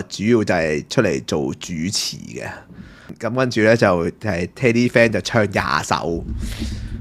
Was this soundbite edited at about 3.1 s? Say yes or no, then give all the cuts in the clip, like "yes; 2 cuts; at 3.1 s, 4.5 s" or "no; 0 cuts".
yes; 1 cut; at 3.1 s